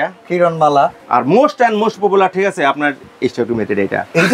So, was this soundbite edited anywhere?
yes; 2 cuts; at 1.0 s, 3.0 s

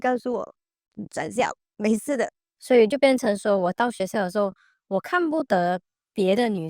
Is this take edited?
yes; 2 cuts; at 1.6 s, 2.5 s

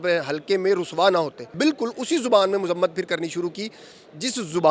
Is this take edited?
yes; 1 cut; at 1.5 s

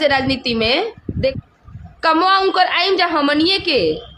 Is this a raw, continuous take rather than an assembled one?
no; 1 cut; at 1.4 s

